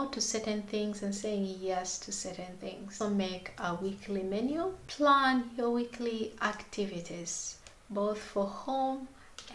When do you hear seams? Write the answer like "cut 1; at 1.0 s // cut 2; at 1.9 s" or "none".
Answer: cut 1; at 2.9 s // cut 2; at 4.9 s